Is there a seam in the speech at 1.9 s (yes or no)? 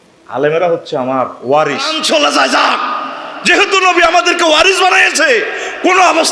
yes